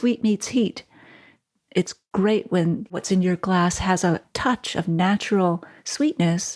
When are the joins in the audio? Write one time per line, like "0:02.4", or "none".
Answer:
0:02.0
0:02.9